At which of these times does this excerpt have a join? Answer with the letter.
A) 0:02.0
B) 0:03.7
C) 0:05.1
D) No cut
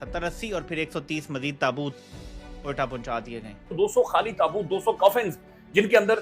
B